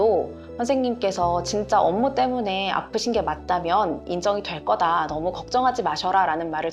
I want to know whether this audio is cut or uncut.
uncut